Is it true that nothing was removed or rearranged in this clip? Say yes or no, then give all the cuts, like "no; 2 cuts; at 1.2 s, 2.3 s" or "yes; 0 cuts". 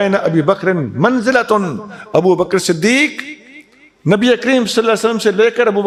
yes; 0 cuts